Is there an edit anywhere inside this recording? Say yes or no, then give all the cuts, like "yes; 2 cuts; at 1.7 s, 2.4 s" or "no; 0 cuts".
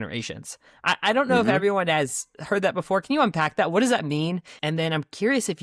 yes; 1 cut; at 4.5 s